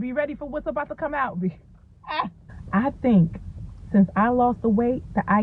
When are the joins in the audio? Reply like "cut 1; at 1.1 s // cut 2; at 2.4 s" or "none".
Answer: cut 1; at 2.5 s